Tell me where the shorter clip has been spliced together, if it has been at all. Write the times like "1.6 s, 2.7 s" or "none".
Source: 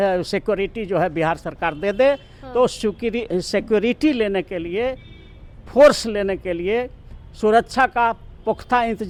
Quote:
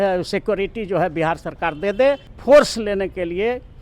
2.3 s